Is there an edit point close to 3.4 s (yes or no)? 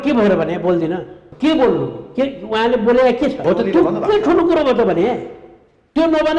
yes